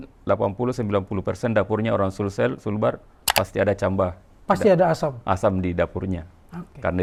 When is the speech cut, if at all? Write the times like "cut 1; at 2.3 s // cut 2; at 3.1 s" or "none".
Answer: none